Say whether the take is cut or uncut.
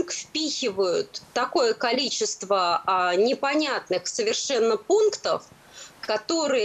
uncut